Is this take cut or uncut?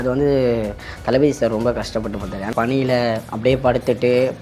cut